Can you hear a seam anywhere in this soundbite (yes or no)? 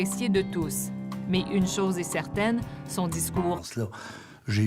no